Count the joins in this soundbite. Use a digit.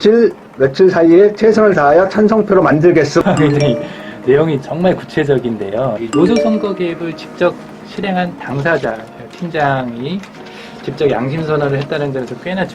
2